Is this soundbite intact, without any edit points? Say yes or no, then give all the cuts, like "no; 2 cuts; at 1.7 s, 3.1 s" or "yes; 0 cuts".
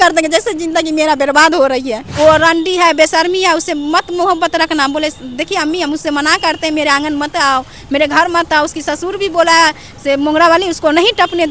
no; 1 cut; at 2.0 s